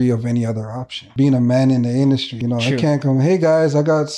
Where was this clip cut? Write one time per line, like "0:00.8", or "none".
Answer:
0:01.0
0:02.3